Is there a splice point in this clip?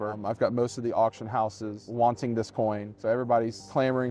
no; 0 cuts

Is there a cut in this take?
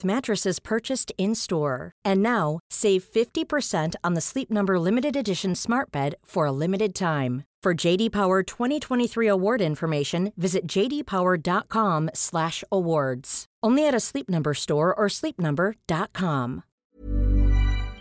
yes; 1 cut; at 16.7 s

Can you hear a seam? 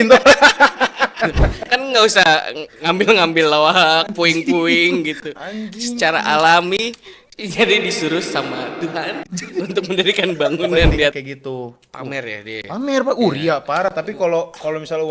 yes; 2 cuts; at 1.5 s, 11.1 s

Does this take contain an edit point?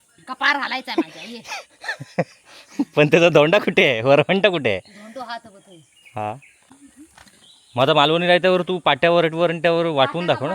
no; 0 cuts

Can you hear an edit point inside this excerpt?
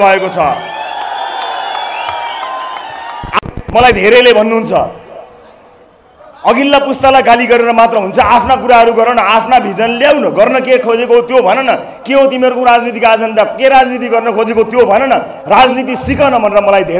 no; 0 cuts

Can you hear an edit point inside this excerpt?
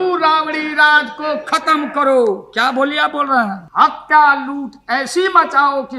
yes; 1 cut; at 3.6 s

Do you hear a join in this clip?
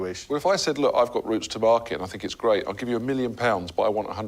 no; 0 cuts

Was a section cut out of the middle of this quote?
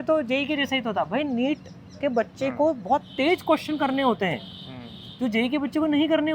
no; 0 cuts

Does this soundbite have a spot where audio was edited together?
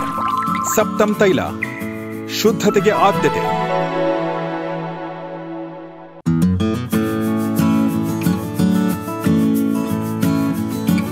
no; 0 cuts

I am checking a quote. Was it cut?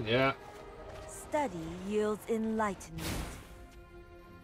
no; 0 cuts

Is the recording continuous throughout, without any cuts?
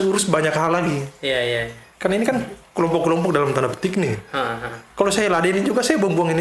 yes; 0 cuts

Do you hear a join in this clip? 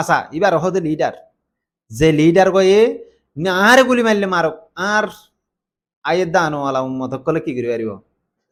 no; 0 cuts

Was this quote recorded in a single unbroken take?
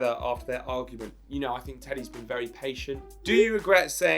no; 2 cuts; at 1.2 s, 3.1 s

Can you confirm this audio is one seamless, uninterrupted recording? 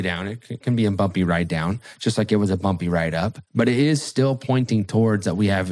no; 1 cut; at 3.4 s

